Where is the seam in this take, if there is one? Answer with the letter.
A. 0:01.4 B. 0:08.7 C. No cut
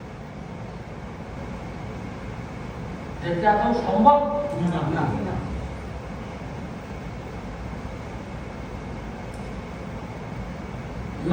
C